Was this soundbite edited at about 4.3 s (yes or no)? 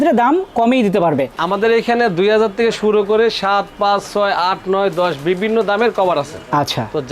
no